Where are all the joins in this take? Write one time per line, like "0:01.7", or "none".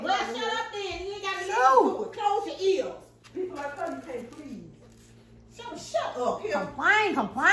0:03.1